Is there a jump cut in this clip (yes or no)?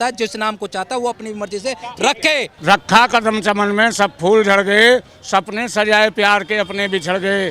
yes